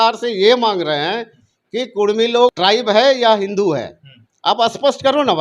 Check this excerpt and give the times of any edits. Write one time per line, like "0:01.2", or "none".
0:02.6